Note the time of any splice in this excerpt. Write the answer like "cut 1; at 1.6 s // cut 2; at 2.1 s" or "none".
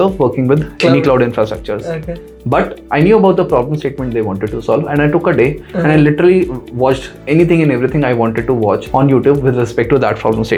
none